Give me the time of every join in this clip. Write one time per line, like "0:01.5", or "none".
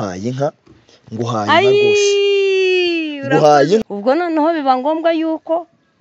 0:03.8